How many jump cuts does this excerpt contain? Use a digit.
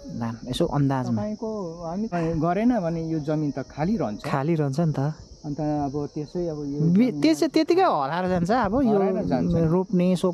1